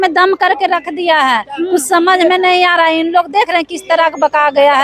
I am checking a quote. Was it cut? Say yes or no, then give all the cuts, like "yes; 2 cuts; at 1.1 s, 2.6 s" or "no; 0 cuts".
no; 0 cuts